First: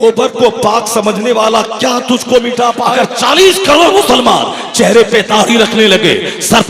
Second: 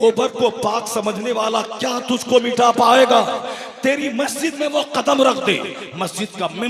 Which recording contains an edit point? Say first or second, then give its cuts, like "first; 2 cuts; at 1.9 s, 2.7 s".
first; 1 cut; at 2.8 s